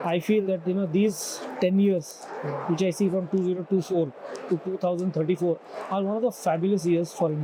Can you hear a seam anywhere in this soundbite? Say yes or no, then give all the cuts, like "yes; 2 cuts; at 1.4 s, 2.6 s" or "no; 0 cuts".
no; 0 cuts